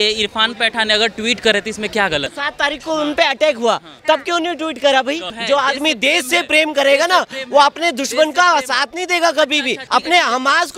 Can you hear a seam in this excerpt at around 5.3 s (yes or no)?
yes